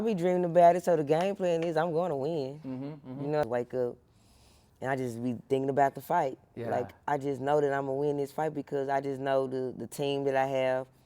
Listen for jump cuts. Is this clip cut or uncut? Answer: cut